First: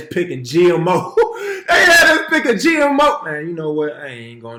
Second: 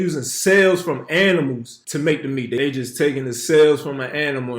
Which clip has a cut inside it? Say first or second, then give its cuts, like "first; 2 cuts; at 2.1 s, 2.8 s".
second; 2 cuts; at 1.7 s, 2.6 s